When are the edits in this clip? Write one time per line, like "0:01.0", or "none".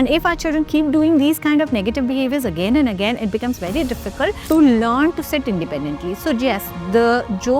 0:04.4